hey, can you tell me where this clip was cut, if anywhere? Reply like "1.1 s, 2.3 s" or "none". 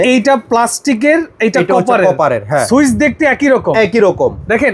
2.6 s